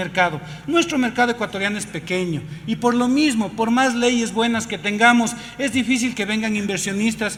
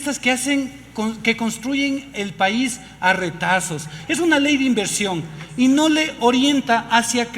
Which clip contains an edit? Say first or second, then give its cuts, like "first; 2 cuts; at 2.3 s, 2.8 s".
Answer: second; 1 cut; at 3.9 s